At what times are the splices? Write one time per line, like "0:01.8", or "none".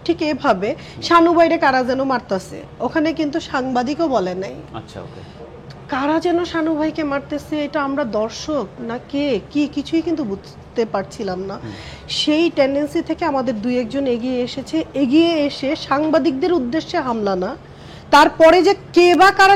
none